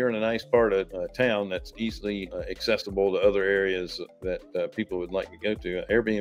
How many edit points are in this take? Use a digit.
2